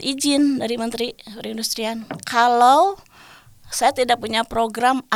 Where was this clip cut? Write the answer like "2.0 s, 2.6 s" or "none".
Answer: none